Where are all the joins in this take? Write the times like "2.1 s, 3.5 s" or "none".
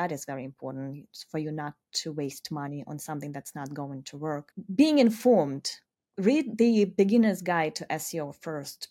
none